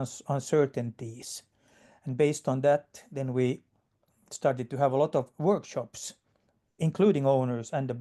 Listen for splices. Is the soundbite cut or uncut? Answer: uncut